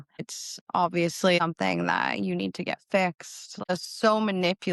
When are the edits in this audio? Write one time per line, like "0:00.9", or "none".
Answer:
0:01.4
0:03.7